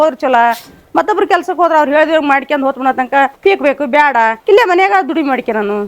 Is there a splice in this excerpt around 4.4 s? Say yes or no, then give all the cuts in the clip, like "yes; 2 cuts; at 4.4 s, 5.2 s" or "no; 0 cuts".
yes; 1 cut; at 4.4 s